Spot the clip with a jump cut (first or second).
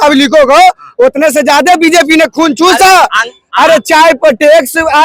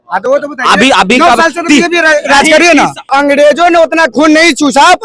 second